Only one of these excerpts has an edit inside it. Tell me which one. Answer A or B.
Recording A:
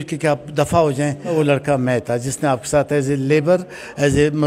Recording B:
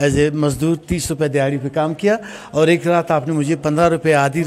A